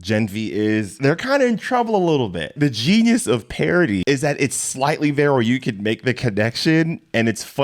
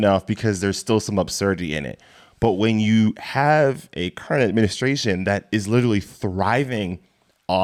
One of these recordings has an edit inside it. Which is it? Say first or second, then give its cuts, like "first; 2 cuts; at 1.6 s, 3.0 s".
first; 3 cuts; at 0.9 s, 2.5 s, 4.0 s